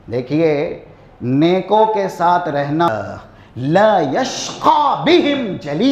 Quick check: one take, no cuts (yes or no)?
no